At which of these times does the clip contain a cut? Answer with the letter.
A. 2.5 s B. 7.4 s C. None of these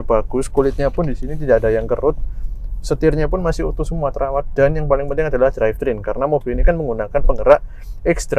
C